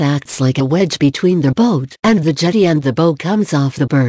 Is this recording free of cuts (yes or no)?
no